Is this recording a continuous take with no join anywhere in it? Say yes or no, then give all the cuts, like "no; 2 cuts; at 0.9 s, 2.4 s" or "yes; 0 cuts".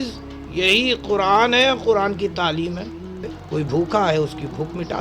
no; 1 cut; at 3.4 s